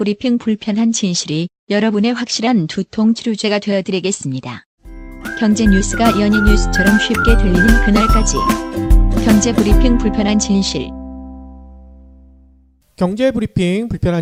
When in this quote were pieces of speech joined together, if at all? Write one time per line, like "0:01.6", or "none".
none